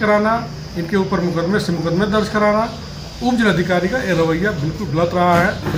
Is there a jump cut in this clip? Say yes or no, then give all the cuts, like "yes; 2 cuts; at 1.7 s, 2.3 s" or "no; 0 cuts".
no; 0 cuts